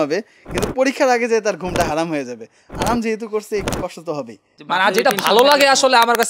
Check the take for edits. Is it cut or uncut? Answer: cut